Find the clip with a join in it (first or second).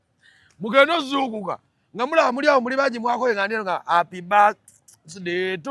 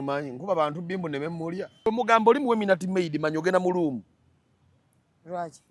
second